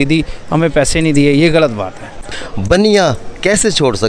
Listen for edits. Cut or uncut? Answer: cut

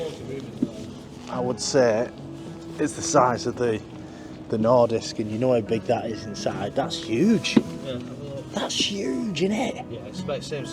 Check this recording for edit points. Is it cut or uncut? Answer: uncut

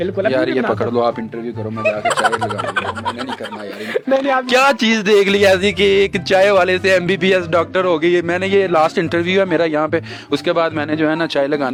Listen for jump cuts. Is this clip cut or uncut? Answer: uncut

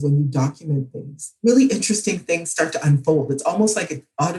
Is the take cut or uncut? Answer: uncut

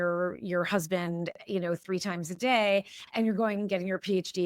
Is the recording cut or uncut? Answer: uncut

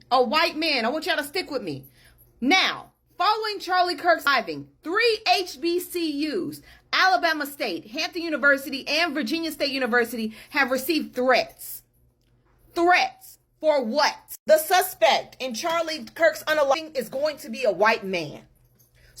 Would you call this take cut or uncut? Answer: cut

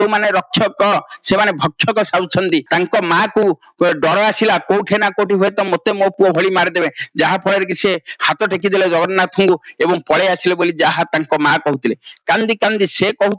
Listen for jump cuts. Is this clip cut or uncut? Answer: uncut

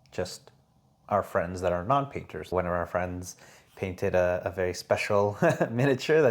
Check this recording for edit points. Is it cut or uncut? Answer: cut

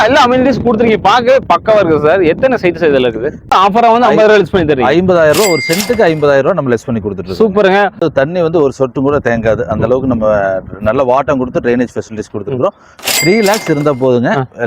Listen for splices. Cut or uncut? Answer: cut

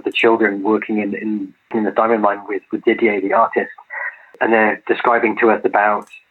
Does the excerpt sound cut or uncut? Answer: uncut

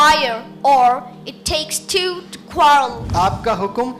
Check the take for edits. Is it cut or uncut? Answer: cut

